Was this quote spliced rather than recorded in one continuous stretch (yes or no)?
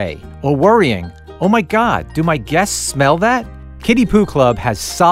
no